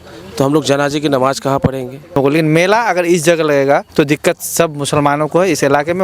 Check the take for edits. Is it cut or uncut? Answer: cut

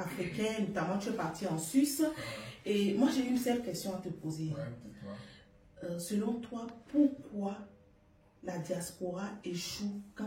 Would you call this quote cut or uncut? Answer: uncut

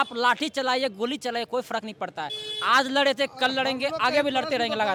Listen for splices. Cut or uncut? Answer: uncut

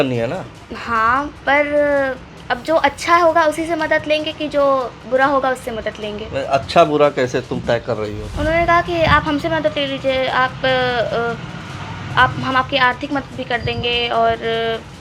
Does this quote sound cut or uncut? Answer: cut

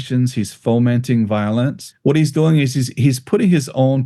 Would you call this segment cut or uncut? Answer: cut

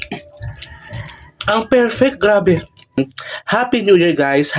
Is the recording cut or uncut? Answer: cut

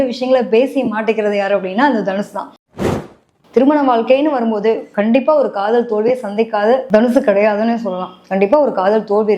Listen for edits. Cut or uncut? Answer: cut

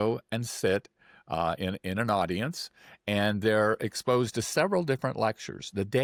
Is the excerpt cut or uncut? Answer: uncut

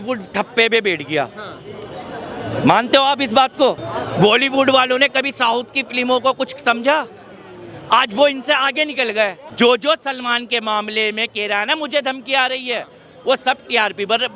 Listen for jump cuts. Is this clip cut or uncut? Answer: cut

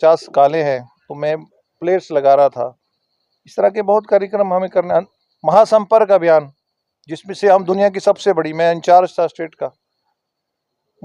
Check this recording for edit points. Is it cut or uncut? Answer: uncut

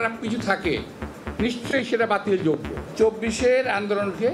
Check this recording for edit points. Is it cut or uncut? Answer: cut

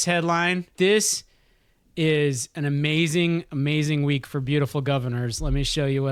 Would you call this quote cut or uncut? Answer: uncut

